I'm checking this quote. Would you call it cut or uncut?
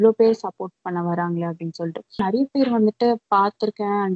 cut